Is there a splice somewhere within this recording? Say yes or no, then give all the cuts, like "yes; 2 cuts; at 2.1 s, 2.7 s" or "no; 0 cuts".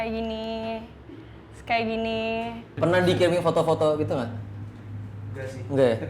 yes; 1 cut; at 2.7 s